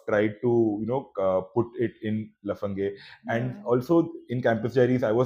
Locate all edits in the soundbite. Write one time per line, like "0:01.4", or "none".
none

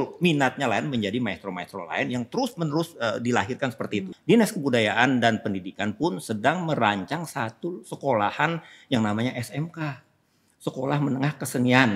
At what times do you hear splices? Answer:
0:04.1

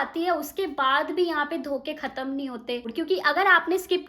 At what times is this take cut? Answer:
0:02.9

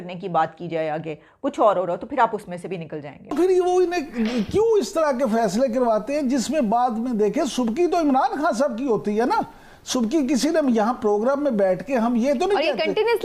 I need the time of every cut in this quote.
0:03.3

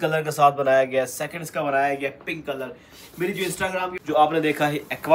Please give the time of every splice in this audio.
0:03.9

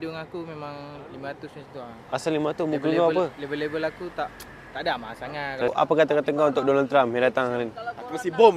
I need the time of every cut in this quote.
0:05.7

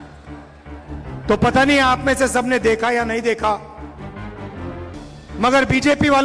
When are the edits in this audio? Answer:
0:01.3
0:03.7
0:05.4

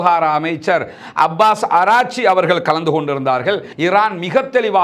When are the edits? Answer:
0:03.7

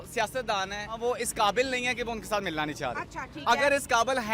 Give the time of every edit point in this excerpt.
0:01.0

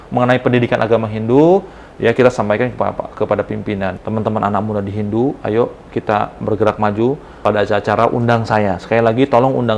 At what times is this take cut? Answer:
0:04.0
0:07.3

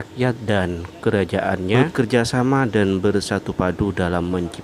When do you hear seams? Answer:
0:01.7

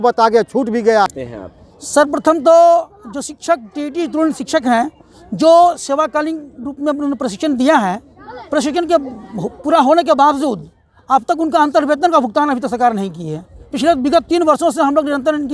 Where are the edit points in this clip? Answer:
0:01.1

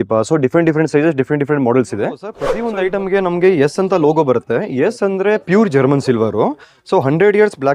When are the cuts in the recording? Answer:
0:02.5

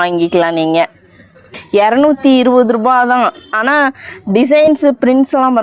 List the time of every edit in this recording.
0:01.5

